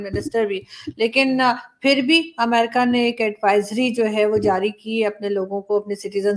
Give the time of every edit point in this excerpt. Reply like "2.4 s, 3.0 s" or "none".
none